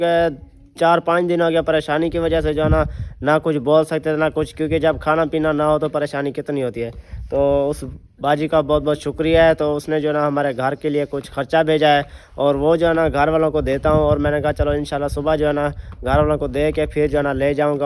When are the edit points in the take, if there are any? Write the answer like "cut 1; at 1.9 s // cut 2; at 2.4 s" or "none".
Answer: none